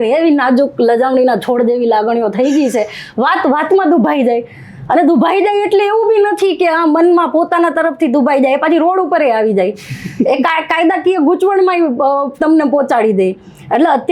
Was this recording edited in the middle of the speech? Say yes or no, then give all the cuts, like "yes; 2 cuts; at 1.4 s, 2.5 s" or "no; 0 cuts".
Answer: no; 0 cuts